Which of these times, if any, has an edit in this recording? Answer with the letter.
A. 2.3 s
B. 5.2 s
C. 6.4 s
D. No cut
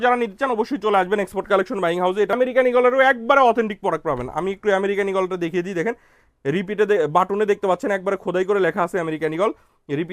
A